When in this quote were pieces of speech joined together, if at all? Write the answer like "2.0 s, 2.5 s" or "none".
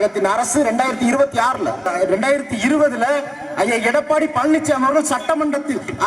1.9 s